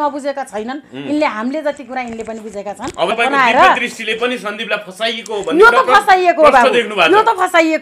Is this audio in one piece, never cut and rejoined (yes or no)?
no